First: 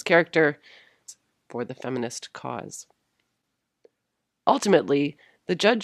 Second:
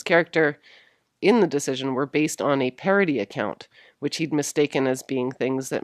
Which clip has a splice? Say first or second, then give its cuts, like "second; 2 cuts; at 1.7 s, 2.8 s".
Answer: second; 1 cut; at 1.1 s